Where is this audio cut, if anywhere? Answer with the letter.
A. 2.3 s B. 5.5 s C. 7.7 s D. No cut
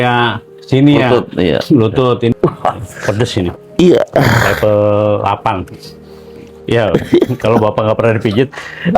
A